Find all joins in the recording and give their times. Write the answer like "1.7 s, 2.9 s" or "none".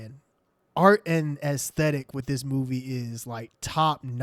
none